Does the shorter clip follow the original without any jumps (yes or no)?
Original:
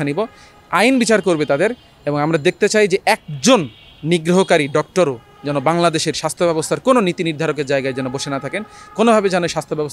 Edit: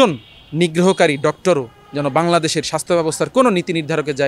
yes